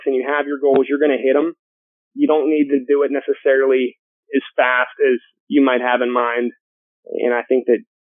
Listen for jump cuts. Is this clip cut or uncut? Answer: uncut